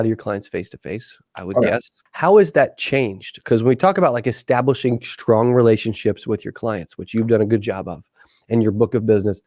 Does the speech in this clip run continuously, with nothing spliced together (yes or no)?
no